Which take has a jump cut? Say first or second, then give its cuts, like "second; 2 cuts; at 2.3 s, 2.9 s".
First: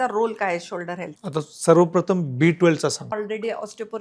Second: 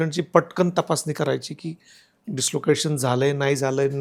first; 1 cut; at 3.1 s